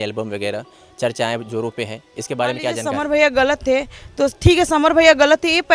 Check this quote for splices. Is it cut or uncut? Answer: cut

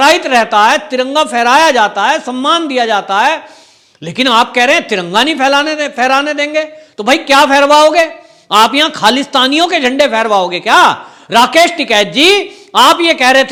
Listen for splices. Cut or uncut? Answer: uncut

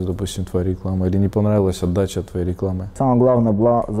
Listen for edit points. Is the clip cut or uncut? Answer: cut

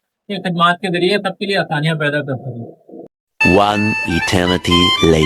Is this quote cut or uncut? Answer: uncut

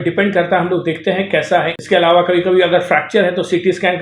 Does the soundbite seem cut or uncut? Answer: cut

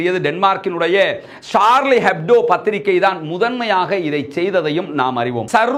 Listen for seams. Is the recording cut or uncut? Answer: uncut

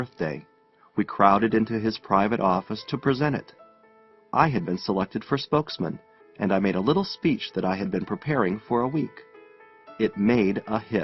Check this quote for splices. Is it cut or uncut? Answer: cut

